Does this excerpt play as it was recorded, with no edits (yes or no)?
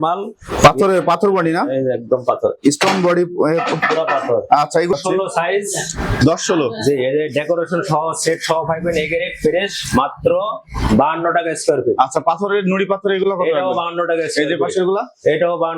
no